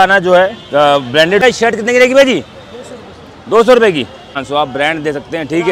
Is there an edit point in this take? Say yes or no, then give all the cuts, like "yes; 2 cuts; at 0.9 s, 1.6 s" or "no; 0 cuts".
yes; 2 cuts; at 1.4 s, 4.4 s